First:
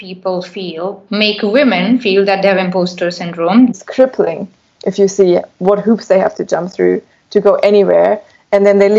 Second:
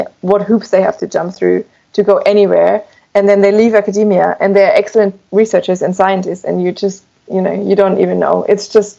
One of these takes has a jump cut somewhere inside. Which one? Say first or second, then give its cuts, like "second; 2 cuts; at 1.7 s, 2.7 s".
first; 1 cut; at 3.7 s